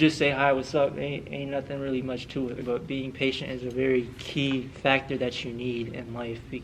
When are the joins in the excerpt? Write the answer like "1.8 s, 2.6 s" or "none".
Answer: 2.6 s